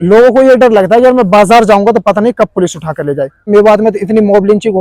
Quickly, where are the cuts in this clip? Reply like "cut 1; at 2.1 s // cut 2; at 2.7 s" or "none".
cut 1; at 3.5 s